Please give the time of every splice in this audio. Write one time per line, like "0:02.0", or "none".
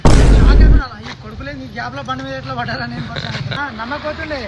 0:03.6